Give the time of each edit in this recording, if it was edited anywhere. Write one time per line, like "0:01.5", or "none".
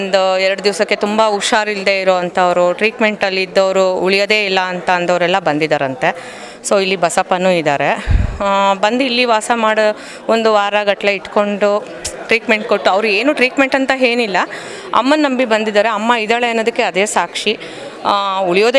none